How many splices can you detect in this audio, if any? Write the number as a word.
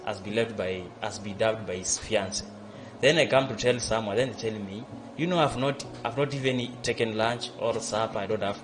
zero